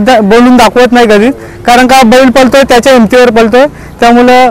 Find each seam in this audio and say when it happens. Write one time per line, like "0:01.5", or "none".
none